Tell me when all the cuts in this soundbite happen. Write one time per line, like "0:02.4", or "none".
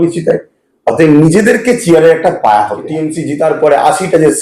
0:03.2